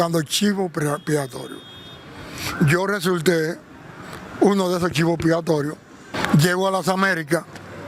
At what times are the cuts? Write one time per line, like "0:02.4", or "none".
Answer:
0:06.1